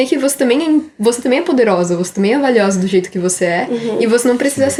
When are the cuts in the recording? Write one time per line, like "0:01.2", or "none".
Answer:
none